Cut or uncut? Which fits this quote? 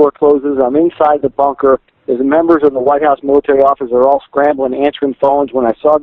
uncut